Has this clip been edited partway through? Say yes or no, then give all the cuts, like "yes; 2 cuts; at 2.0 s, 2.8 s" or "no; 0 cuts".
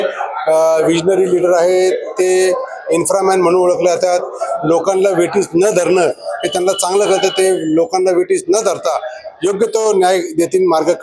no; 0 cuts